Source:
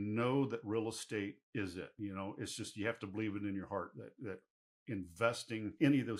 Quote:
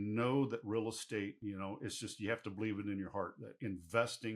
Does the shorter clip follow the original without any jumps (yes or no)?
no